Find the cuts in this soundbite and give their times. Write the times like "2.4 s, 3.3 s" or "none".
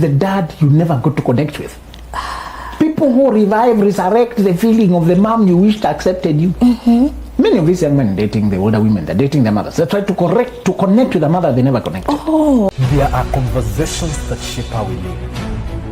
12.7 s